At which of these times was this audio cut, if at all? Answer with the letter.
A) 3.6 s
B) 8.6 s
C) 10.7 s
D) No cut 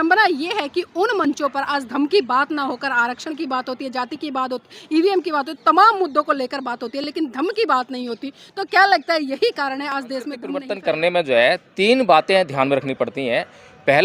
C